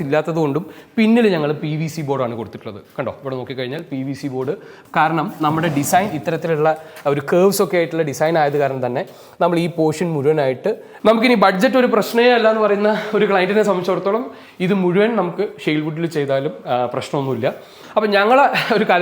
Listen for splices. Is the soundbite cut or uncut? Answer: cut